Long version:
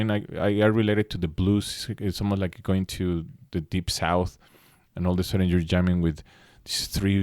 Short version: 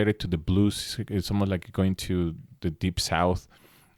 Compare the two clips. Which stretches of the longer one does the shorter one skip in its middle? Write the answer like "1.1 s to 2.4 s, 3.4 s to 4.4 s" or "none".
none